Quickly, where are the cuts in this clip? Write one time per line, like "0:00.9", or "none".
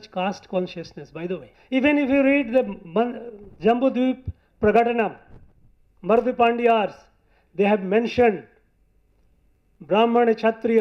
0:01.5